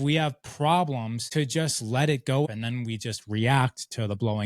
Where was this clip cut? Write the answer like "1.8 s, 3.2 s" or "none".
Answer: 1.2 s, 2.5 s